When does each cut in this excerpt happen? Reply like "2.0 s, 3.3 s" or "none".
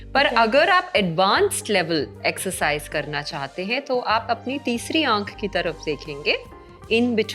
none